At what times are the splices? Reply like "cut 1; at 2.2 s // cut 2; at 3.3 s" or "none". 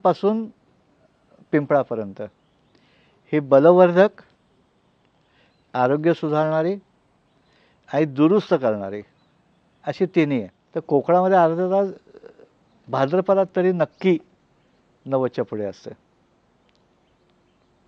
cut 1; at 10.6 s